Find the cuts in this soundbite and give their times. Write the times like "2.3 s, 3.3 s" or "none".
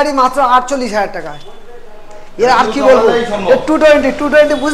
none